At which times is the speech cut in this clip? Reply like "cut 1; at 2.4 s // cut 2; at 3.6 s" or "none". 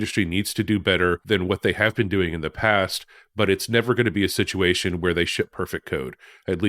cut 1; at 1.2 s

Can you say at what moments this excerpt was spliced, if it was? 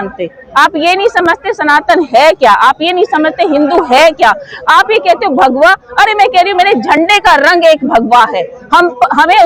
none

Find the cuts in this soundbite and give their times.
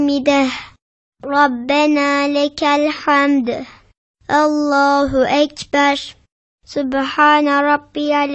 cut 1; at 3.9 s // cut 2; at 6.6 s

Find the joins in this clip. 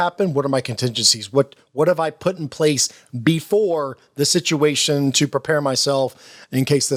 none

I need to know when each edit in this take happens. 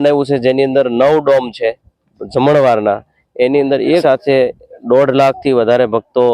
cut 1; at 4.0 s

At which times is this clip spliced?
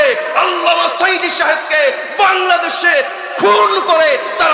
none

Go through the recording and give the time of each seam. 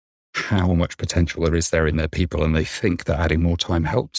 none

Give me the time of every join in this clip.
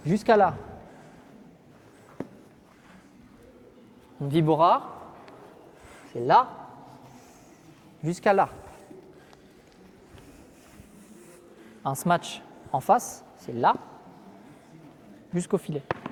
none

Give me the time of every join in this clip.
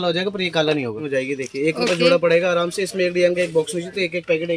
cut 1; at 1.0 s

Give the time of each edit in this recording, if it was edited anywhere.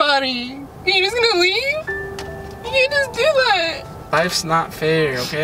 cut 1; at 4.0 s

